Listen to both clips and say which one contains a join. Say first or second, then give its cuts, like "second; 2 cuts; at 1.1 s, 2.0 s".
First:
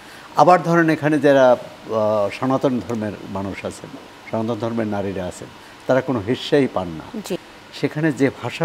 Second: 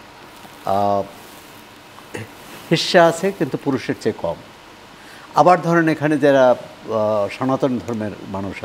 first; 1 cut; at 7.5 s